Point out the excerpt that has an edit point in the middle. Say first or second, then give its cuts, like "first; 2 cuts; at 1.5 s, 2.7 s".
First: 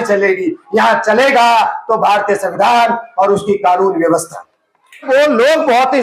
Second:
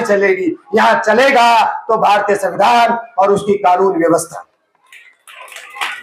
first; 1 cut; at 5.1 s